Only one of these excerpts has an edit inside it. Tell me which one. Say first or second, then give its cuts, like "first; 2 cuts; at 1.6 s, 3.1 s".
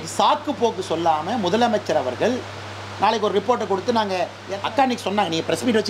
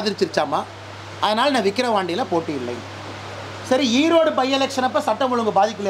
first; 1 cut; at 4.4 s